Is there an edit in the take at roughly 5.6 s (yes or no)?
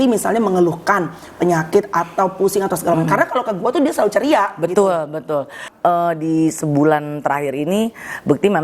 yes